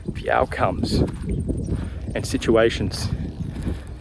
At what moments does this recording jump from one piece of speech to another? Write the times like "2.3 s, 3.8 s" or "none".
none